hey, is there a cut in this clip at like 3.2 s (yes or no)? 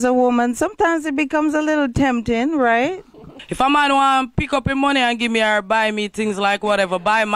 no